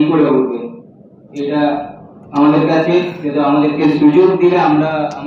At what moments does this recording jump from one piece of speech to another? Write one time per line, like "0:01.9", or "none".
none